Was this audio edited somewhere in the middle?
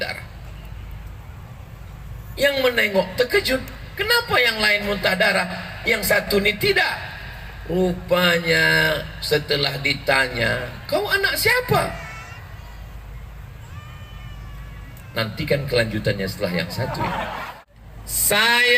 yes; 1 cut; at 17.4 s

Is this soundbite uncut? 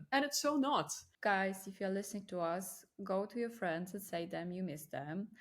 no; 1 cut; at 1.0 s

